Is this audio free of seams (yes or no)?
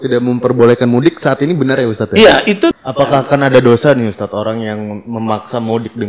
no